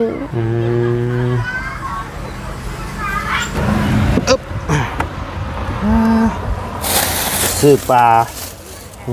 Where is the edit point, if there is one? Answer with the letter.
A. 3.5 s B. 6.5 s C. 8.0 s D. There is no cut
A